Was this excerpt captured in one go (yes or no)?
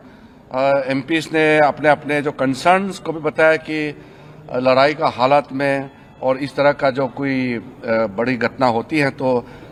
yes